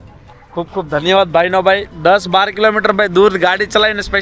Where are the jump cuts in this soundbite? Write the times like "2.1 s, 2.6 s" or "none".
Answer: none